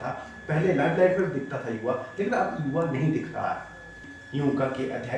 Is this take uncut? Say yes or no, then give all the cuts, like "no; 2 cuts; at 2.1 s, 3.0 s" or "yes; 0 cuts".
no; 1 cut; at 4.2 s